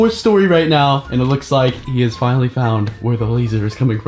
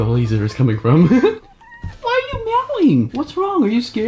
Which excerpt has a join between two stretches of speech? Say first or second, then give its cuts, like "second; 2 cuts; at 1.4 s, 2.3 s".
second; 2 cuts; at 2.0 s, 3.2 s